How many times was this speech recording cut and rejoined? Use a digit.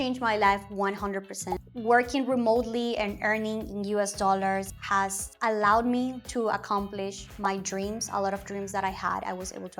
2